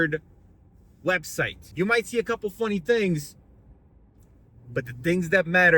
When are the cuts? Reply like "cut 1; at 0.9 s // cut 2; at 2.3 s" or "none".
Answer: cut 1; at 1.6 s